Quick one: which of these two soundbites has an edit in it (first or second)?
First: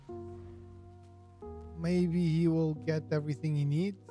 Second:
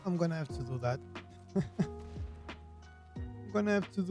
first